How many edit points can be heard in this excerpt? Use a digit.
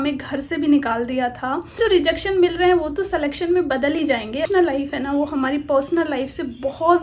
2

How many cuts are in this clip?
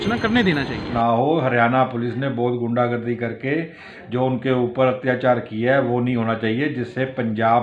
1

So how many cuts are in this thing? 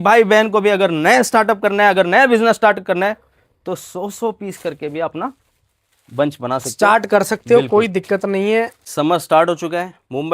1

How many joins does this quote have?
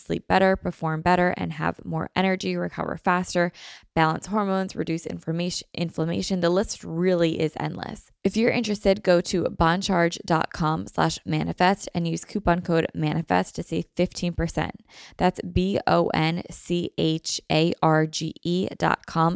1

